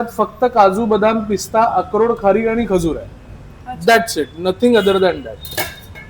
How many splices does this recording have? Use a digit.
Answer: 0